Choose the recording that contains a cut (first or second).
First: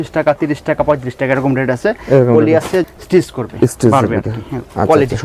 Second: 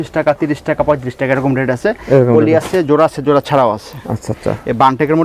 first